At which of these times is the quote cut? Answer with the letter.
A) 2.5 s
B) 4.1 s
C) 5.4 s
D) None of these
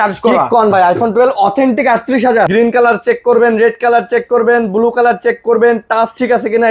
A